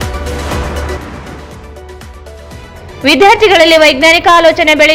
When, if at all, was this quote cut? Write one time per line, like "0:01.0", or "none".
0:01.4